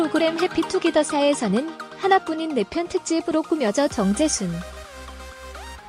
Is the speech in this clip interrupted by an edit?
yes; 1 cut; at 4.7 s

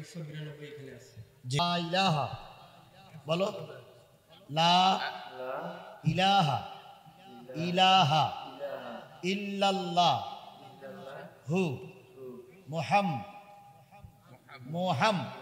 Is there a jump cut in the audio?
yes; 1 cut; at 1.6 s

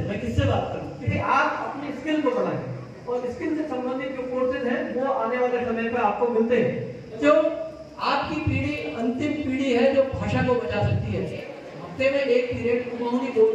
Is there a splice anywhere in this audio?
yes; 3 cuts; at 1.1 s, 7.2 s, 11.5 s

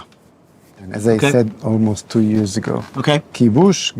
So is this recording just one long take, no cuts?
no; 1 cut; at 0.9 s

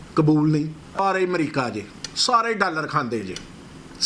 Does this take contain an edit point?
yes; 1 cut; at 1.0 s

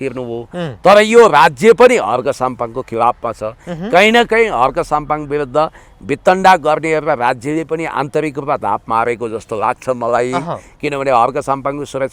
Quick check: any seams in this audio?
no; 0 cuts

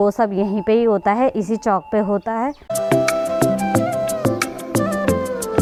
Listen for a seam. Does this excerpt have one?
no; 0 cuts

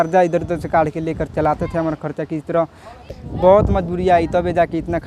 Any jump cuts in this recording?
yes; 1 cut; at 3.1 s

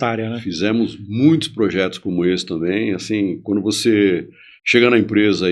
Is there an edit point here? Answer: no; 0 cuts

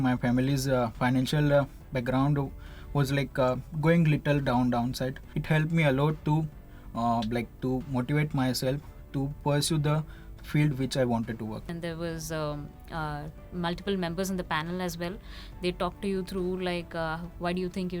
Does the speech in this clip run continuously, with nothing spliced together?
no; 2 cuts; at 5.3 s, 11.7 s

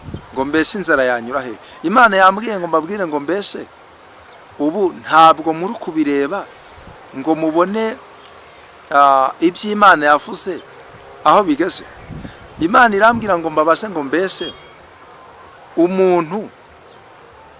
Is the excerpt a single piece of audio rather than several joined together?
yes; 0 cuts

